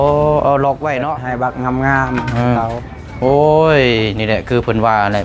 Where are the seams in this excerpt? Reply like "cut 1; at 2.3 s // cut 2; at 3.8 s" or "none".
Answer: cut 1; at 1.2 s